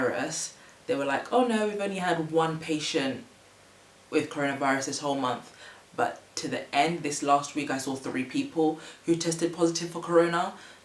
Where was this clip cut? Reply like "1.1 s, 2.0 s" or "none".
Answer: none